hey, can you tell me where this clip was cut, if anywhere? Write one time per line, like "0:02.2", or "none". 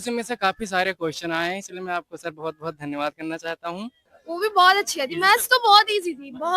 0:04.1